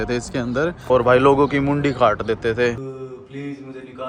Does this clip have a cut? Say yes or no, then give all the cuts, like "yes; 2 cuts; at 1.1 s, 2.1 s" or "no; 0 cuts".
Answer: yes; 2 cuts; at 0.8 s, 2.8 s